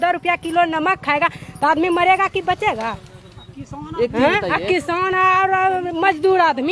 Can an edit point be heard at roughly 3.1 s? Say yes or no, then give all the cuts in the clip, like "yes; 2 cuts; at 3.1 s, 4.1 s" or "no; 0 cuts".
no; 0 cuts